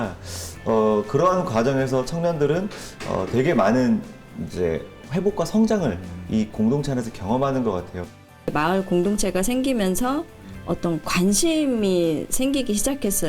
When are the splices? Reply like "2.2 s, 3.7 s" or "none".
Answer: 8.5 s